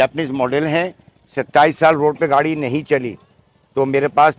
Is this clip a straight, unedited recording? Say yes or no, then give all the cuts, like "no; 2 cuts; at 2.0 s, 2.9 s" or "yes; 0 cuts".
yes; 0 cuts